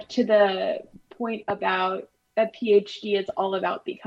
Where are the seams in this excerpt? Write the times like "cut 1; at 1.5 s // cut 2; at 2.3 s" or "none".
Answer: none